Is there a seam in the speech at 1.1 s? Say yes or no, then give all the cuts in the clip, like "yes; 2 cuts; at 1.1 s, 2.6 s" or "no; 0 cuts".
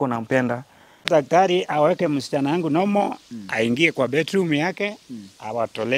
yes; 1 cut; at 1.1 s